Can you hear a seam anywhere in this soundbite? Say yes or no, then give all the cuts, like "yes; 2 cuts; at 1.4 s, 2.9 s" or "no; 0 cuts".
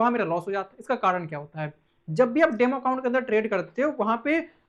no; 0 cuts